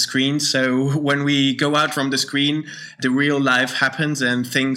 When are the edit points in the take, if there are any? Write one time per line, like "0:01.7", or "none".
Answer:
0:01.9
0:03.0